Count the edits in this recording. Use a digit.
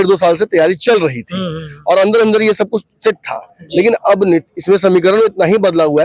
0